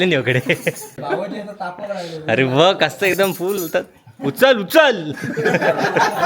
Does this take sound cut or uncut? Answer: cut